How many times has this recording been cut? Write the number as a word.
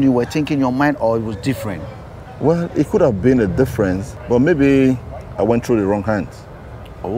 one